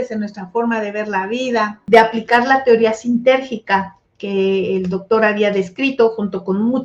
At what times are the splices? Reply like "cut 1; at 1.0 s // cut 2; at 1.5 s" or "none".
cut 1; at 1.8 s

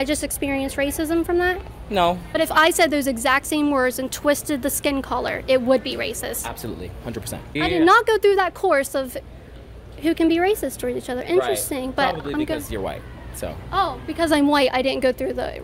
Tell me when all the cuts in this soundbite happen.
cut 1; at 2.3 s // cut 2; at 7.4 s

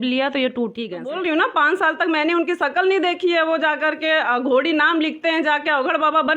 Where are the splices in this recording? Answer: cut 1; at 1.2 s

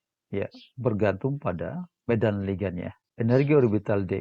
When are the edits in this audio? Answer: cut 1; at 1.9 s // cut 2; at 3.0 s

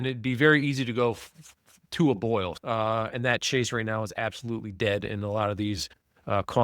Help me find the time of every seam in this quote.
cut 1; at 2.5 s

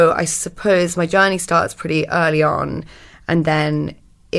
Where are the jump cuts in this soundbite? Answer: cut 1; at 1.1 s

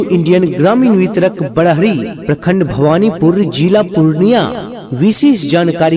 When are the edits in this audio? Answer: cut 1; at 4.7 s

